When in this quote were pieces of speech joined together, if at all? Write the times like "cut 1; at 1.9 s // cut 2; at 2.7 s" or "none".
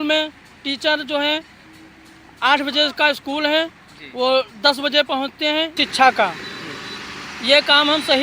cut 1; at 5.8 s